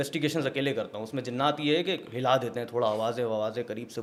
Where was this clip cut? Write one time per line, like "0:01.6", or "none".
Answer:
none